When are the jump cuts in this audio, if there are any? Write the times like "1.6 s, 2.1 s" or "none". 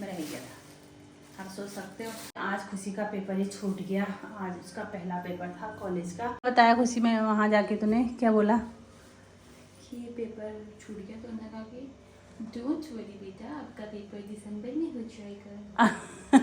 2.4 s, 6.4 s